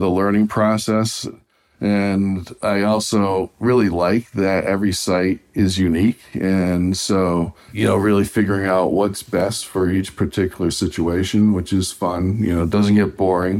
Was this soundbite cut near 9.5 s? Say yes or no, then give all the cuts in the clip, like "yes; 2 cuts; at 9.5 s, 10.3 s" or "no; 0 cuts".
no; 2 cuts; at 7.6 s, 12.7 s